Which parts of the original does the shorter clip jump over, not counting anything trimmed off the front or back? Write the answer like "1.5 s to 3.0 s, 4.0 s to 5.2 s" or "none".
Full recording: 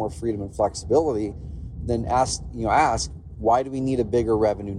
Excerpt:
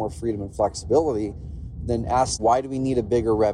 2.3 s to 3.4 s